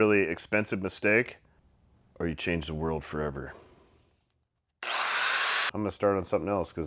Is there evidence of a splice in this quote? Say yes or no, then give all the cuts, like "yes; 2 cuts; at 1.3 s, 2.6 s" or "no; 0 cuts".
yes; 1 cut; at 5.7 s